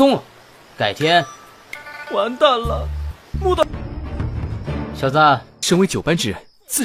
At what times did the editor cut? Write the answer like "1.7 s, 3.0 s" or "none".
3.6 s